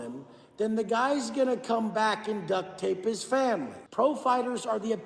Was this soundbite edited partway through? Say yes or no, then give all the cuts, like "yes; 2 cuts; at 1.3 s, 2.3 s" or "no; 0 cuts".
yes; 1 cut; at 3.8 s